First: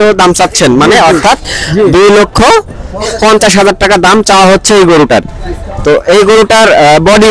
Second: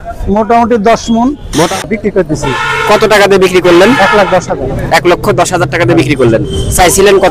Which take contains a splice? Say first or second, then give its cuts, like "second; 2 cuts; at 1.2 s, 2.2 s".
second; 1 cut; at 1.7 s